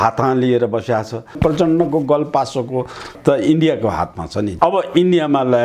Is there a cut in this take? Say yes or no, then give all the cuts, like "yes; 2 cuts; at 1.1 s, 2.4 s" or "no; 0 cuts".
yes; 3 cuts; at 1.4 s, 3.2 s, 4.5 s